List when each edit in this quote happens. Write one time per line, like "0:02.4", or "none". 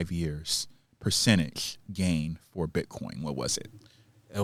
none